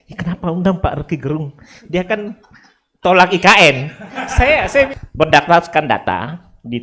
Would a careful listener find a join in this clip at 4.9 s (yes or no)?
yes